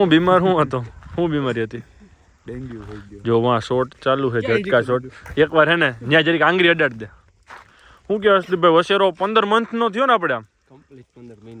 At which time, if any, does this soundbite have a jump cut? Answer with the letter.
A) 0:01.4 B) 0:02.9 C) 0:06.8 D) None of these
A